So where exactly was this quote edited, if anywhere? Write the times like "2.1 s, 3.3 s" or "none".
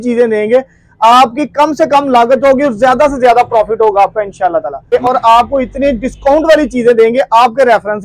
4.8 s